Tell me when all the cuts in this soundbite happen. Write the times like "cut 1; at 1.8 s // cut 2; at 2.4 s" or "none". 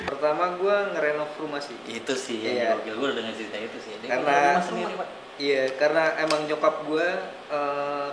none